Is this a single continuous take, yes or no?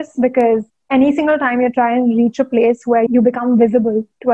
no